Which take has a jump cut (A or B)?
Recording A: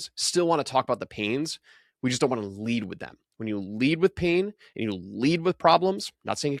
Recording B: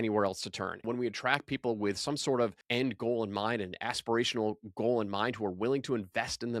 B